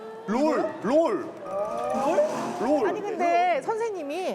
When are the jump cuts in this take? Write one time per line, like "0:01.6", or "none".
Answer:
0:03.0